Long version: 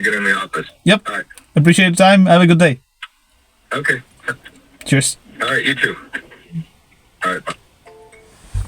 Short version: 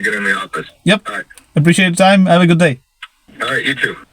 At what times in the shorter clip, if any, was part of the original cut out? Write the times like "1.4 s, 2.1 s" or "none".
3.2 s